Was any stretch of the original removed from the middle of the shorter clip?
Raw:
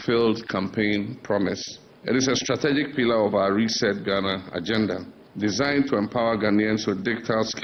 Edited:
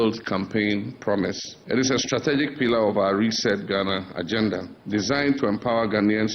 yes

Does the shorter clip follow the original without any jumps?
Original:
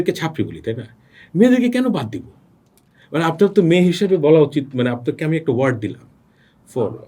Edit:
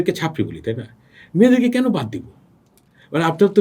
yes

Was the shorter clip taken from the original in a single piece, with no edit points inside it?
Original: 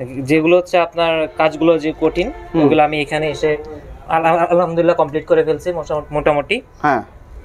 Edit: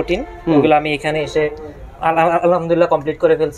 yes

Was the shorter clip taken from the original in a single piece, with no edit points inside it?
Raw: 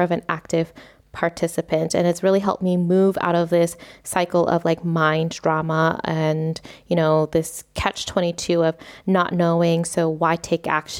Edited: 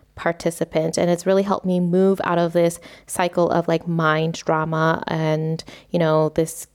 yes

